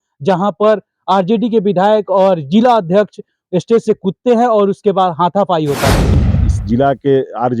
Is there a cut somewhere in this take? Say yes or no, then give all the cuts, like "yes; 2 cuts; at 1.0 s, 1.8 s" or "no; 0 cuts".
yes; 1 cut; at 6.1 s